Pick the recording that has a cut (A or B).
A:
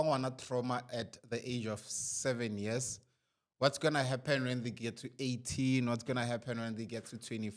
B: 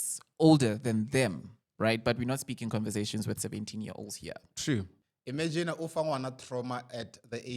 B